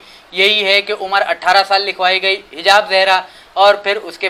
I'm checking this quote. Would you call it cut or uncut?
uncut